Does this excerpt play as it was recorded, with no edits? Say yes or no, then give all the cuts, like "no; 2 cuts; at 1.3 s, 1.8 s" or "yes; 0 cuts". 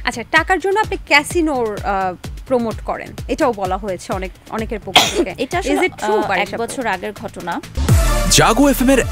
no; 1 cut; at 7.7 s